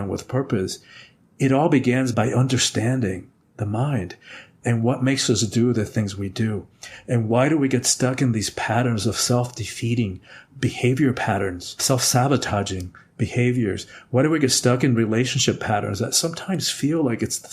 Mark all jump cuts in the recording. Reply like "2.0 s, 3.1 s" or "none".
none